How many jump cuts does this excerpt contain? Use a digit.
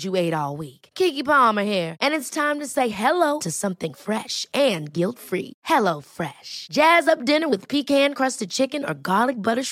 0